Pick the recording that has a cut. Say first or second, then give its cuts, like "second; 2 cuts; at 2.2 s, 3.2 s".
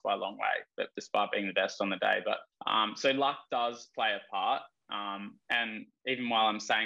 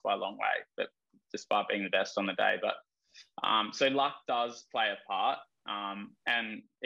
first; 2 cuts; at 1.0 s, 2.5 s